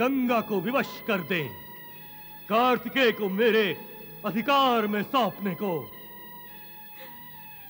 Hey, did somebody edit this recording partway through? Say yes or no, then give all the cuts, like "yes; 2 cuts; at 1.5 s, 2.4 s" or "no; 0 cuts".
no; 0 cuts